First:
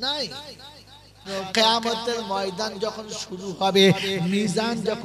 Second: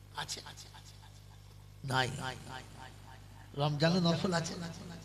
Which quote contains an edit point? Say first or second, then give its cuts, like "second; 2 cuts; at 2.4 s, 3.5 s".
first; 1 cut; at 1.3 s